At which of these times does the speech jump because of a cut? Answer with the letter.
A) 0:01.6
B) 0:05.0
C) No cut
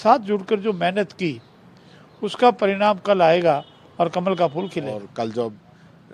B